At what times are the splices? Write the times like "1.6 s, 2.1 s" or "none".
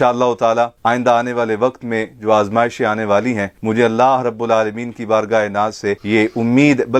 none